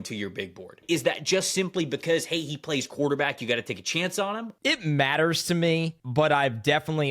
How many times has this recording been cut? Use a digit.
3